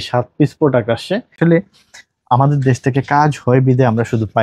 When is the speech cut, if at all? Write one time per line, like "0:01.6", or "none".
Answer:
0:01.4